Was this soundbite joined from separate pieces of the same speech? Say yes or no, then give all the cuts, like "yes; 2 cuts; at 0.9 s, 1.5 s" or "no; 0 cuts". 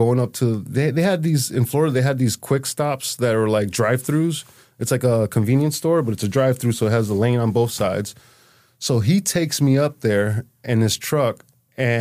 no; 0 cuts